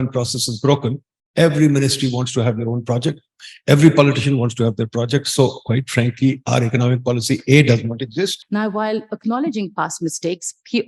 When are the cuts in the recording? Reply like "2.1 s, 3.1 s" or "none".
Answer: 8.4 s

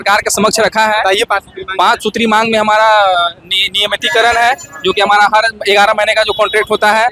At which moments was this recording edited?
none

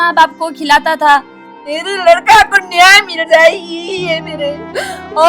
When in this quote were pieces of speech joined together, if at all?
1.7 s

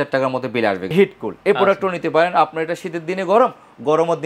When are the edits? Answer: 0.9 s

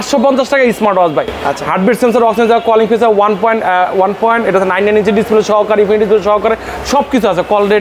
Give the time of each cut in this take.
none

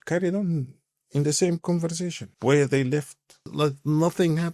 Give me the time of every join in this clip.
2.2 s, 3.5 s

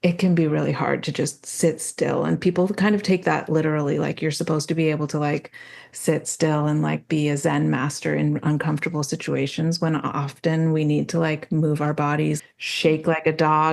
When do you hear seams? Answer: 12.4 s

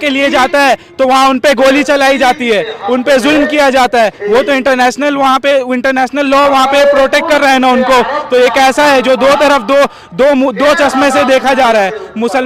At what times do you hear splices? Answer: none

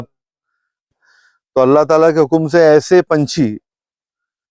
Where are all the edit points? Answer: 1.0 s

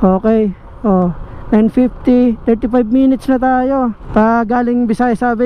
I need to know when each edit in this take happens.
4.0 s

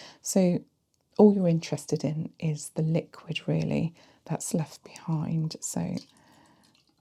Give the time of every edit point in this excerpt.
none

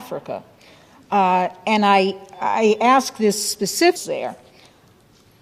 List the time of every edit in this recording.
none

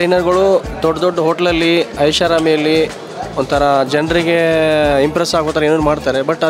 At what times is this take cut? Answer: none

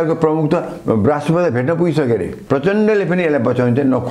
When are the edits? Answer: 2.4 s

